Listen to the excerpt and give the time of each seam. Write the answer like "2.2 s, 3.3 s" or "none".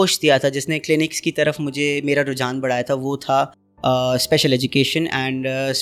none